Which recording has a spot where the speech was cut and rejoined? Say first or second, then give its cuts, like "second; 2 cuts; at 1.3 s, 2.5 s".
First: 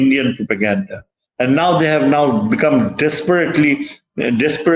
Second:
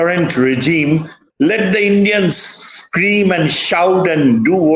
second; 1 cut; at 1.2 s